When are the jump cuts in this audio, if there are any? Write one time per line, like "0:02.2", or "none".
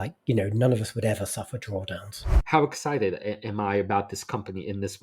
0:02.3